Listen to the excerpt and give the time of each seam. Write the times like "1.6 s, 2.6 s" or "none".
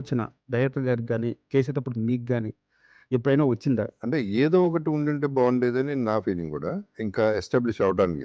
3.9 s, 6.9 s